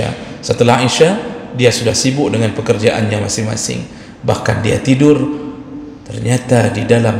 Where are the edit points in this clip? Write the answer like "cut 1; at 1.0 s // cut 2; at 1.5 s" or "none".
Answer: none